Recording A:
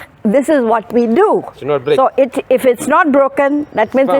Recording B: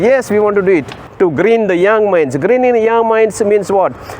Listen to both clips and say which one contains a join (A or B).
B